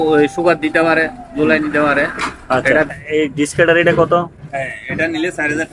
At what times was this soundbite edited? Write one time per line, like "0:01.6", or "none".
0:02.9